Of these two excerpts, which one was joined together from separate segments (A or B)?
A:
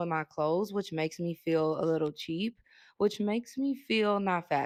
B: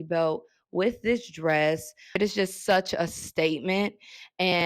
B